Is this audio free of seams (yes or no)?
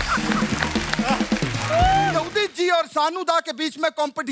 no